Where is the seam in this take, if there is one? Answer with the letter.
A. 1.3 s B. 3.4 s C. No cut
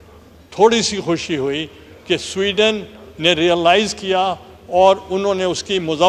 C